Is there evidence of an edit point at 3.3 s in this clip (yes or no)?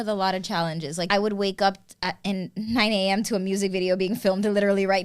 no